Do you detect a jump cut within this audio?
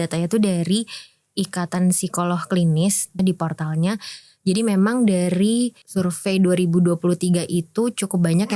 yes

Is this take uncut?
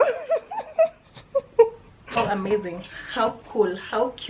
no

